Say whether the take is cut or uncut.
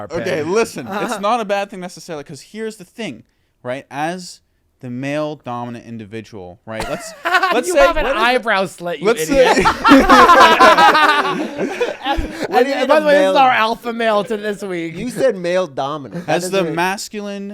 uncut